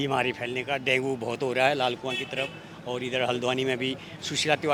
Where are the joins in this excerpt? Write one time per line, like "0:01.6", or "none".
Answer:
none